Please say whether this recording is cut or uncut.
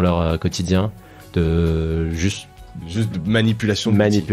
uncut